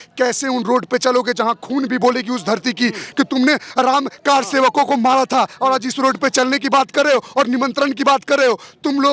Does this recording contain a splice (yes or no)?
no